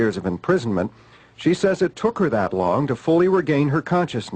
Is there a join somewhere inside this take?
yes; 1 cut; at 2.8 s

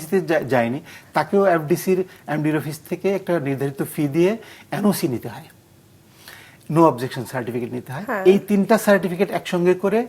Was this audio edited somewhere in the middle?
no; 0 cuts

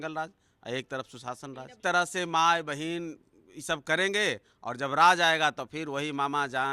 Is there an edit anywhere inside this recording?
yes; 1 cut; at 1.8 s

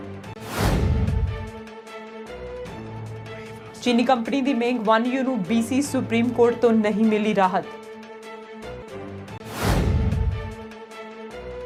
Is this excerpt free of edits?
yes; 0 cuts

